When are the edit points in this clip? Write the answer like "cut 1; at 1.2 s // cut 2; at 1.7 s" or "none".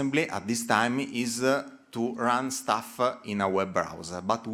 none